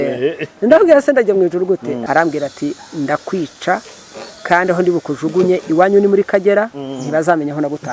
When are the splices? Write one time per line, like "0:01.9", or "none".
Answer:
0:02.0